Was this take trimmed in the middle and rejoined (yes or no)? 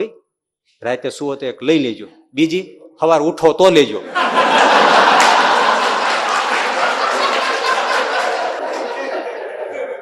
no